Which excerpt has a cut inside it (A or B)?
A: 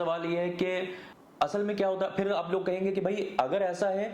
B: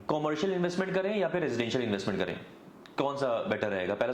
A